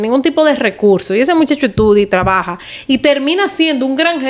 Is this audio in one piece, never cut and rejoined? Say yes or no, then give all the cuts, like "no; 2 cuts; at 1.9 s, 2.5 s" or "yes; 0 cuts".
yes; 0 cuts